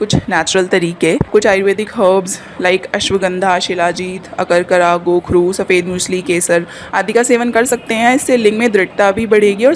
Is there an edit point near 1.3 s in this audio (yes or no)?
yes